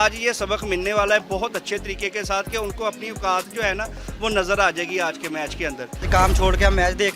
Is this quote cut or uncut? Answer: cut